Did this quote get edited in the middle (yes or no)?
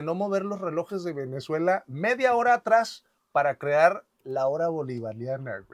no